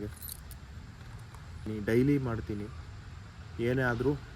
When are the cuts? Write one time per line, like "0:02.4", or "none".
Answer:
0:01.7